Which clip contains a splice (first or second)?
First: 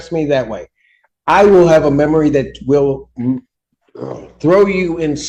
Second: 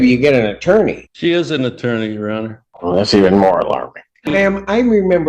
second